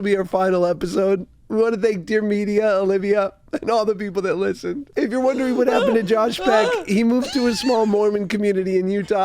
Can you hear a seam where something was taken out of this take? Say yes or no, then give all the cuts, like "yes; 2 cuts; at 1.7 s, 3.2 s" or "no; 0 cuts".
yes; 1 cut; at 4.8 s